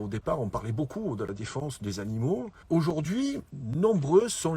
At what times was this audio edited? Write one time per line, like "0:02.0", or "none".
0:02.6
0:03.5